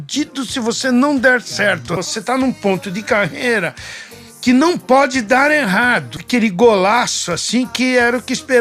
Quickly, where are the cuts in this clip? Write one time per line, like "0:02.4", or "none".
0:02.1
0:06.2